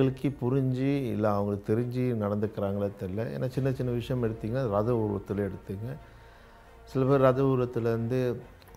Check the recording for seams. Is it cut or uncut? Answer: uncut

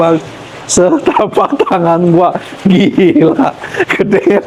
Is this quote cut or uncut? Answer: uncut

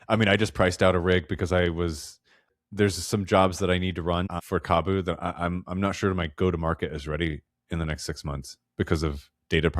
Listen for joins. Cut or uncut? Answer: cut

